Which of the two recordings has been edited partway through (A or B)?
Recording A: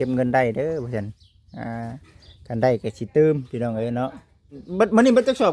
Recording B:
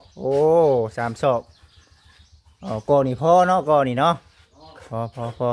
A